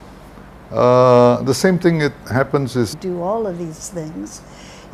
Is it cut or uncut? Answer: uncut